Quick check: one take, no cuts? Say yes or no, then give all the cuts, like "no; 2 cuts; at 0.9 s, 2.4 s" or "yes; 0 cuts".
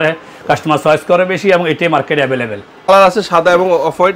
no; 1 cut; at 2.9 s